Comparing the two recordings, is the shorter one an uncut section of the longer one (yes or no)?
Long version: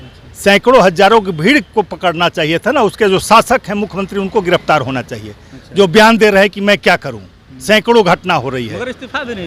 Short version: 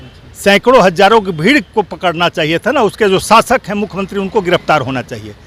yes